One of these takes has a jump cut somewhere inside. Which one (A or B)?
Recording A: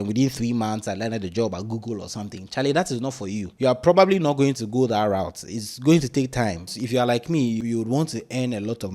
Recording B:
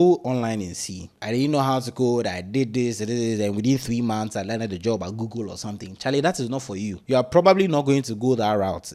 A